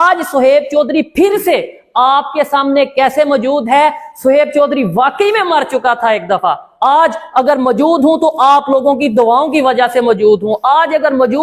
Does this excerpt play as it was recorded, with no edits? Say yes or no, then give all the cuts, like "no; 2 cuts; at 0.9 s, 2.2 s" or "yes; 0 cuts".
yes; 0 cuts